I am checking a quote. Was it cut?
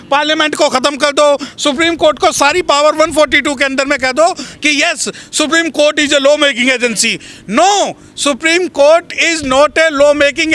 no; 0 cuts

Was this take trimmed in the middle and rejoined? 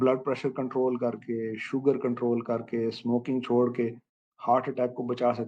no; 0 cuts

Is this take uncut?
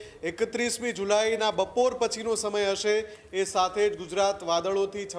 yes; 0 cuts

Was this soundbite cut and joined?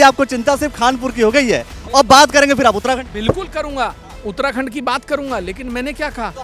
no; 0 cuts

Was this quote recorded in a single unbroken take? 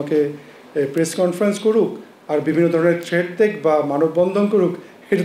yes; 0 cuts

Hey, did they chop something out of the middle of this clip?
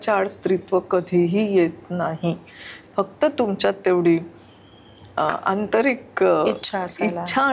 no; 0 cuts

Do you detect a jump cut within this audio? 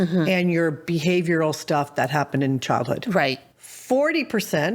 yes; 1 cut; at 3.5 s

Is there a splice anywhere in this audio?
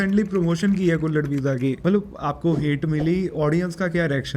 yes; 1 cut; at 1.8 s

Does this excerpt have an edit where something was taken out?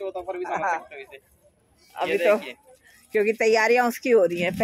no; 0 cuts

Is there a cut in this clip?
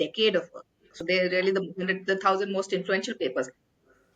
yes; 1 cut; at 1.0 s

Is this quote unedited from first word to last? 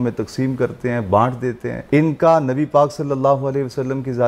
no; 1 cut; at 1.7 s

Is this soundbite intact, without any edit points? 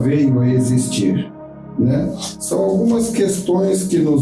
yes; 0 cuts

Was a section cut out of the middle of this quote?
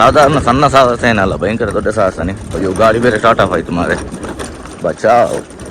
yes; 1 cut; at 2.4 s

